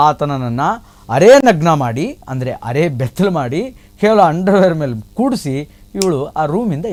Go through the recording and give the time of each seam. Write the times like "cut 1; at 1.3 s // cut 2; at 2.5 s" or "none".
none